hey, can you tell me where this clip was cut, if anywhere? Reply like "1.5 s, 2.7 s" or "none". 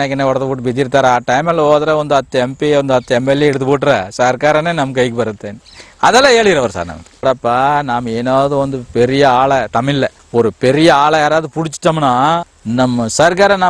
7.2 s, 10.2 s, 12.5 s